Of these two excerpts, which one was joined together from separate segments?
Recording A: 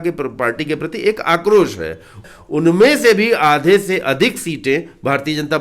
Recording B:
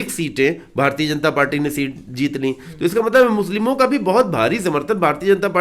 A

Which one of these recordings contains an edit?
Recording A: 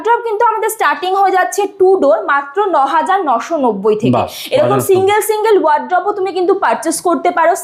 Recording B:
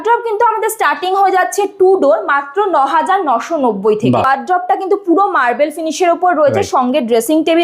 B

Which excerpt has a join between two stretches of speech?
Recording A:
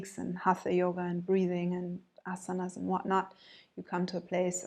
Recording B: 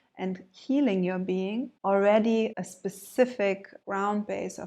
B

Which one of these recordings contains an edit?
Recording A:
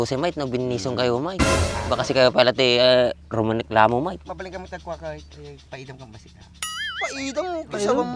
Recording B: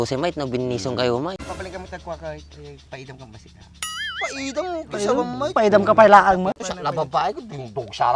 B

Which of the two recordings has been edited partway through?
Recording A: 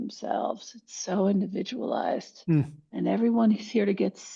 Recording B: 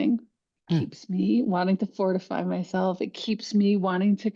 A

